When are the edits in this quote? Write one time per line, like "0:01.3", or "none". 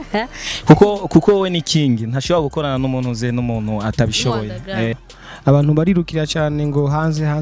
0:05.0